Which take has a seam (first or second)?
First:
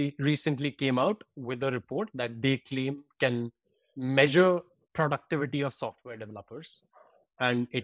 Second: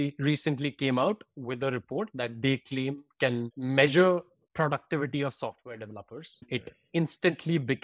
second